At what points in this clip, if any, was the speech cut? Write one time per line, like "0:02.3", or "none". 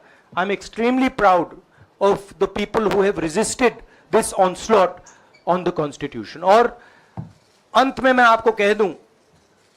none